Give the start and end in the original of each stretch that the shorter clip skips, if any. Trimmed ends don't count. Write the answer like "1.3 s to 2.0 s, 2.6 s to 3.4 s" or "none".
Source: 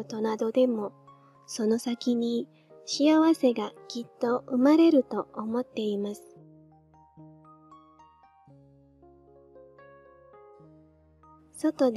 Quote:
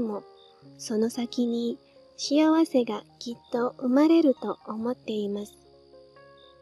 6.2 s to 9.1 s

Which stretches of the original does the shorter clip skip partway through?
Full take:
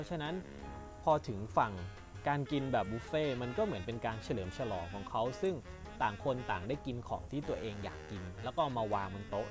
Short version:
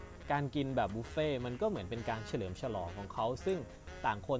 none

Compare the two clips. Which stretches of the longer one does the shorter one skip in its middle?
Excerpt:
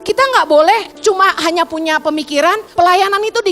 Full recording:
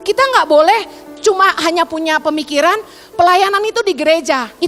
0.9 s to 1.1 s, 2.8 s to 3.1 s

